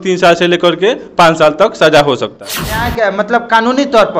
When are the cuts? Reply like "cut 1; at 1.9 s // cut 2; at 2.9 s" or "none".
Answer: cut 1; at 2.9 s